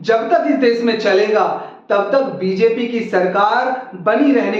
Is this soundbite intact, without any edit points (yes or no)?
yes